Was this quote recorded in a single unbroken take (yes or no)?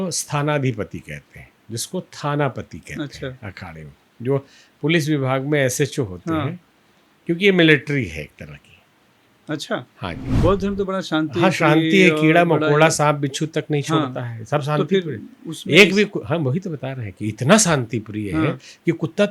no